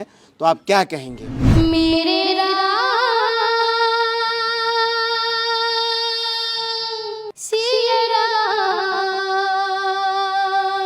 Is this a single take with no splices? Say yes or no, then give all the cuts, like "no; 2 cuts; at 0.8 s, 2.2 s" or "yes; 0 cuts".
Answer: no; 2 cuts; at 1.3 s, 7.4 s